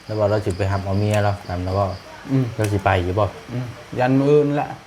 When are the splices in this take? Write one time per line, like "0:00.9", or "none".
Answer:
none